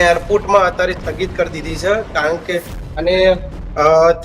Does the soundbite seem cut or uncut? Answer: uncut